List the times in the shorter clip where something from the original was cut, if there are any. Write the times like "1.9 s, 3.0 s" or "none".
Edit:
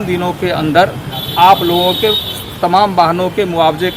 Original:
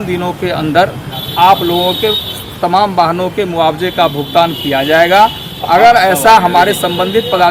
none